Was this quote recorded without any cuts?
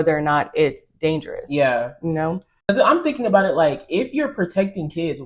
no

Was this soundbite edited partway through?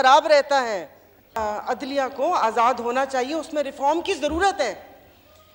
yes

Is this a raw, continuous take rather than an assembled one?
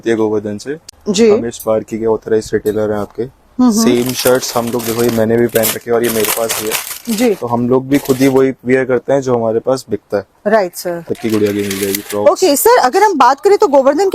no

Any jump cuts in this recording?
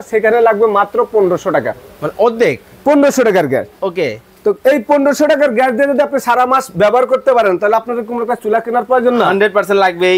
no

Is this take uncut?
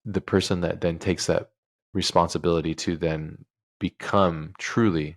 no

